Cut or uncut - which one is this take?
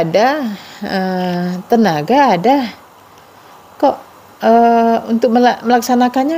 uncut